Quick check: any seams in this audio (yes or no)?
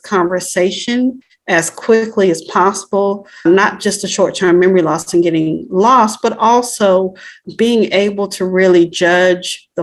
yes